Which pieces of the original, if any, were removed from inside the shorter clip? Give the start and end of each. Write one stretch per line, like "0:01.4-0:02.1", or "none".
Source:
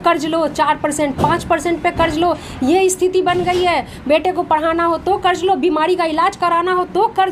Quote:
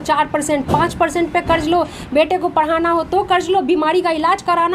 0:02.5-0:03.9

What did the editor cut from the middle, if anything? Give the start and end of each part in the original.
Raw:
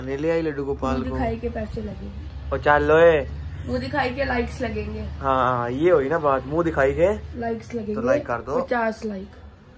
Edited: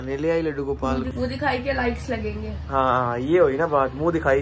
0:01.1-0:03.6

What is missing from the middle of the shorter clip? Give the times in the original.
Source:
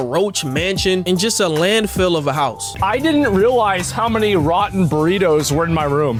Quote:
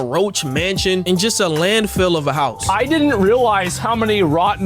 0:02.6-0:02.7

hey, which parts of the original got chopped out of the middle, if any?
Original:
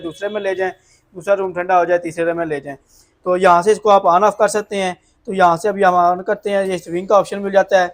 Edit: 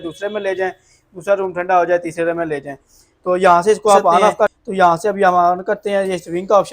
0:04.6-0:05.2

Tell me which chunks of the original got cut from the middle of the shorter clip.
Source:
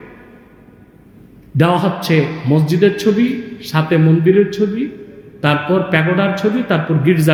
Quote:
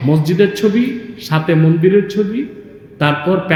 none

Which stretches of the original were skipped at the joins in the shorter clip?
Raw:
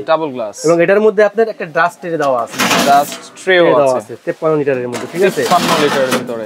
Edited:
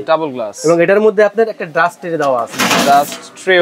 none

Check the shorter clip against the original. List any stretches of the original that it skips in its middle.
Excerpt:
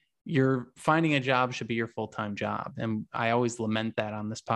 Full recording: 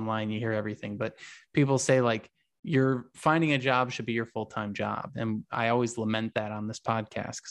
none

